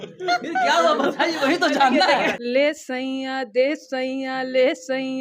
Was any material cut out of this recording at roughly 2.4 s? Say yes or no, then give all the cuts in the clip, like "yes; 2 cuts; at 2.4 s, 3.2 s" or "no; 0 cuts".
yes; 1 cut; at 2.4 s